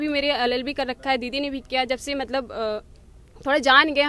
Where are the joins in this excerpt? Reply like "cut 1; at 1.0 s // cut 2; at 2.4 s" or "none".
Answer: none

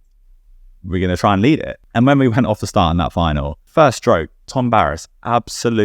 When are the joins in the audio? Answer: cut 1; at 1.8 s // cut 2; at 3.7 s

